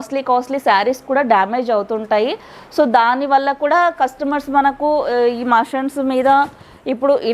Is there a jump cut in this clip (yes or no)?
no